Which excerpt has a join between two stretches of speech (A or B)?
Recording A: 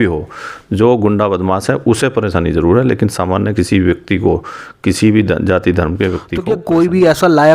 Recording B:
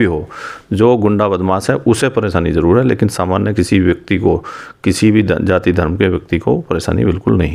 A